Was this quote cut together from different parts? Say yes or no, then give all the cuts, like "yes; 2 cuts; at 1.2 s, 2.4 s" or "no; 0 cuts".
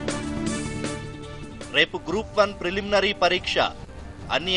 yes; 1 cut; at 1.0 s